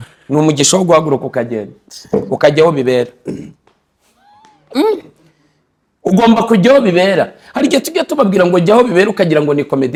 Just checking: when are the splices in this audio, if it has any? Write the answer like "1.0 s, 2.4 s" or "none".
none